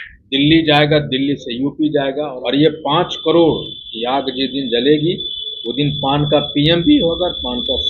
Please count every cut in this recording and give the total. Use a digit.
1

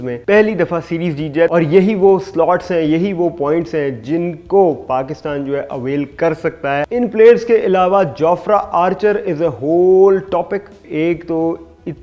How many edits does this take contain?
3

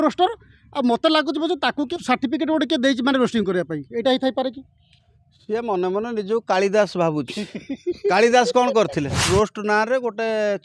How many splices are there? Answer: 2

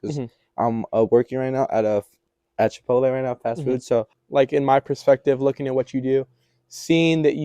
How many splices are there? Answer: 1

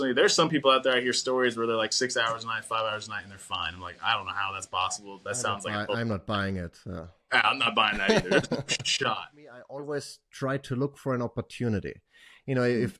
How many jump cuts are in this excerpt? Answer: 1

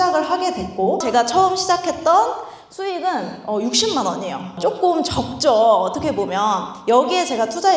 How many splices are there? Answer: 2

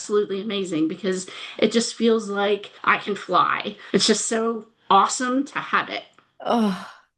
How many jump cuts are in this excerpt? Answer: 1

